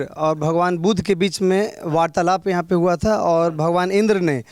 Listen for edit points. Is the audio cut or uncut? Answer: uncut